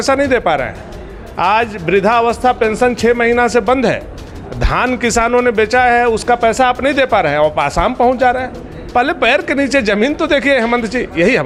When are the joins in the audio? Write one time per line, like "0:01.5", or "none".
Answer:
none